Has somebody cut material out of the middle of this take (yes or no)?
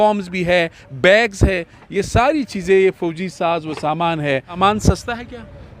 yes